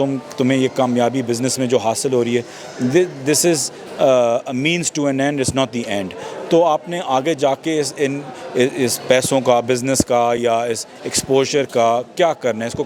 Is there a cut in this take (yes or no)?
no